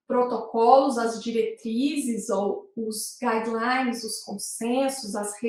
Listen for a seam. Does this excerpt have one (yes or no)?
no